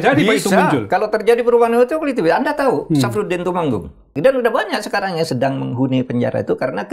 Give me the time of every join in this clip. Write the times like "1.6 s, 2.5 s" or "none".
4.1 s